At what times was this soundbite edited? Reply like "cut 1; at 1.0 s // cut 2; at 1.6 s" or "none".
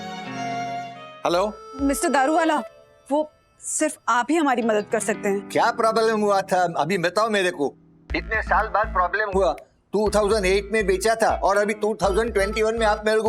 cut 1; at 1.1 s